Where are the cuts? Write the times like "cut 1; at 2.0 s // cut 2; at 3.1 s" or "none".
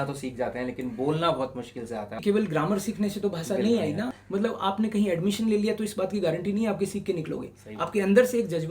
cut 1; at 2.2 s // cut 2; at 4.2 s